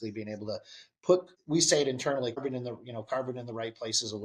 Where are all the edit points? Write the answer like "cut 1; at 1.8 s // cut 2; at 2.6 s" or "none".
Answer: cut 1; at 1.3 s // cut 2; at 2.4 s